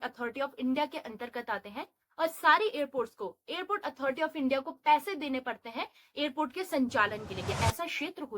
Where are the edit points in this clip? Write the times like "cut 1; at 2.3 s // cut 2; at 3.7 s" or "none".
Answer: cut 1; at 7.5 s